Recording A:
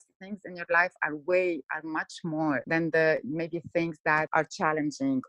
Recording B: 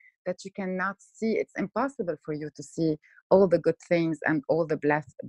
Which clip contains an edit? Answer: A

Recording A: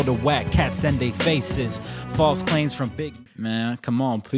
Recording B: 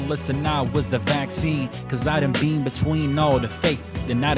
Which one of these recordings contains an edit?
A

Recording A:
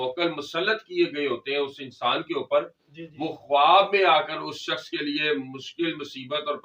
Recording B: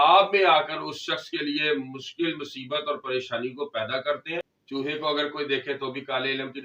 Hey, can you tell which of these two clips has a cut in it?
B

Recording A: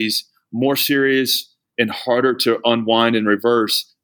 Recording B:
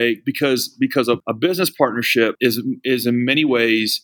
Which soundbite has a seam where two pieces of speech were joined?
B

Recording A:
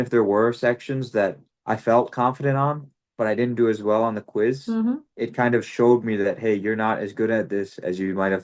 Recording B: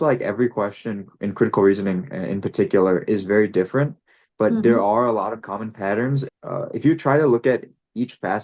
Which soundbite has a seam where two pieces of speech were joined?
B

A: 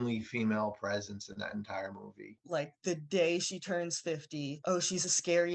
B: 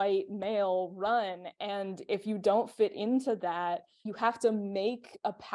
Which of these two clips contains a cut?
A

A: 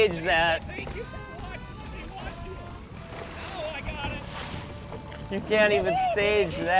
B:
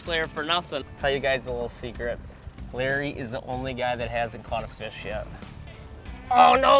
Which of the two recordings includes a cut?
B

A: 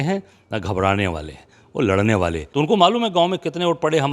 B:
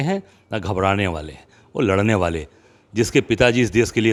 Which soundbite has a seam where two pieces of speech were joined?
A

